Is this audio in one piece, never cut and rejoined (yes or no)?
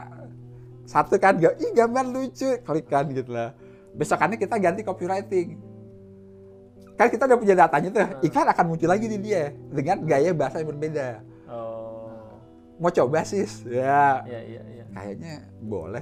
yes